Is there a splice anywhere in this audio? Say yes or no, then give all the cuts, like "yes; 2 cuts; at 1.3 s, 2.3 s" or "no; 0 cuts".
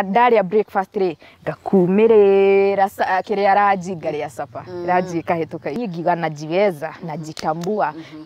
yes; 1 cut; at 5.8 s